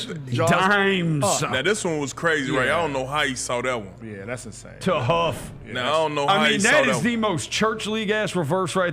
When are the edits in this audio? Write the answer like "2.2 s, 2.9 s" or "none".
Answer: 1.2 s